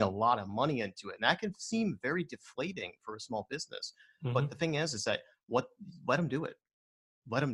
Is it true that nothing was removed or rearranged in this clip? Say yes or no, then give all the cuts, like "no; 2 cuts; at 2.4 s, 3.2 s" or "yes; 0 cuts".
yes; 0 cuts